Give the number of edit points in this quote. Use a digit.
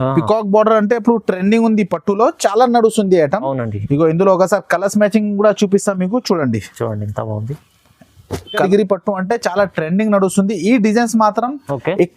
1